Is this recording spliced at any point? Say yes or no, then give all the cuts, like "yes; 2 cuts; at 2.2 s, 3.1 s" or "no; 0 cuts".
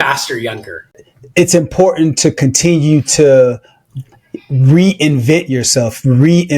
yes; 1 cut; at 0.9 s